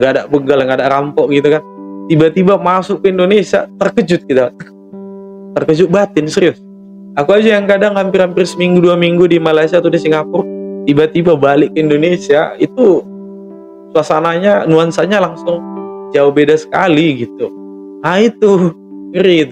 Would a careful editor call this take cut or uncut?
uncut